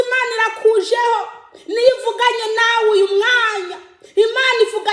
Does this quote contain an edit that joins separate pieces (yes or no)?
no